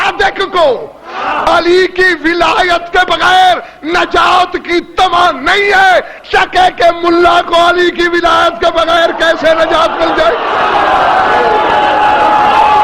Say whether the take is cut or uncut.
uncut